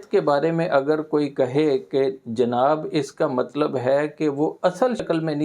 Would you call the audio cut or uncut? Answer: uncut